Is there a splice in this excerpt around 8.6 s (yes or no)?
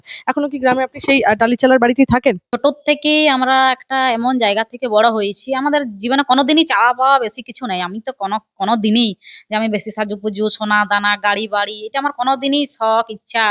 no